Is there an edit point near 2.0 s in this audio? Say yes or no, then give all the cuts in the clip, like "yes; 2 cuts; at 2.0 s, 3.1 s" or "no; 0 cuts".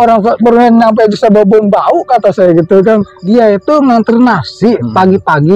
no; 1 cut; at 3.3 s